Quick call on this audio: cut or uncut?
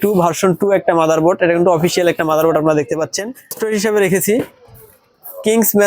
cut